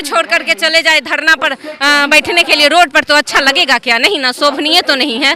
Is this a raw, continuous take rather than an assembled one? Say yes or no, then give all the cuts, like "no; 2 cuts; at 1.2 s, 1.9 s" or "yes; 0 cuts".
yes; 0 cuts